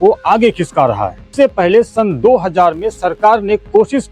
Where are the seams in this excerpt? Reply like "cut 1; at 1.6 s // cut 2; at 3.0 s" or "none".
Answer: cut 1; at 1.3 s